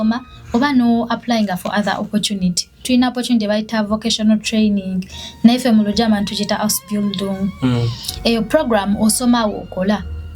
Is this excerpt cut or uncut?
cut